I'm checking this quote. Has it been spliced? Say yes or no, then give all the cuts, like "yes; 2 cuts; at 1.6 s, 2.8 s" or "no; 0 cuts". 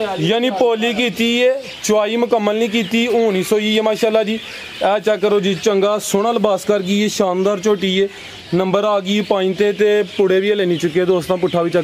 no; 0 cuts